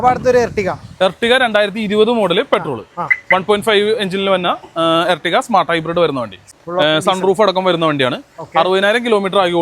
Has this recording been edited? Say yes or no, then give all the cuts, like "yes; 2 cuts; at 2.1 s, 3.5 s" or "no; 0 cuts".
yes; 1 cut; at 6.4 s